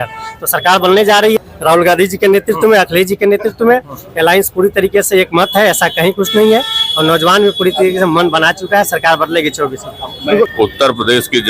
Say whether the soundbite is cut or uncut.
cut